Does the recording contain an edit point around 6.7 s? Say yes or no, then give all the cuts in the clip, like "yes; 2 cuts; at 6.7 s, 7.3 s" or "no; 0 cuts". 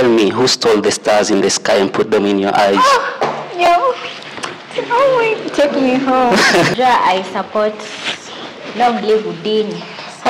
yes; 1 cut; at 6.7 s